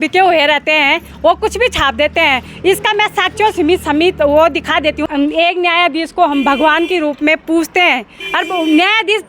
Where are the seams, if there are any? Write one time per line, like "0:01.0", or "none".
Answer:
0:05.0